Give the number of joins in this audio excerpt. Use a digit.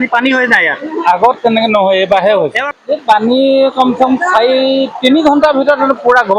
1